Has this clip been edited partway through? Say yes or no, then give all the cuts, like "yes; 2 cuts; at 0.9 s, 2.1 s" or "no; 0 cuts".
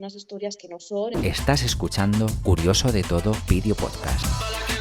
yes; 1 cut; at 1.2 s